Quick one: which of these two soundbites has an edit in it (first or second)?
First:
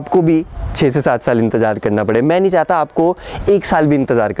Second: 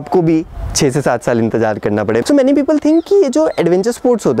second